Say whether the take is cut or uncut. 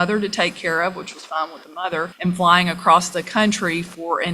cut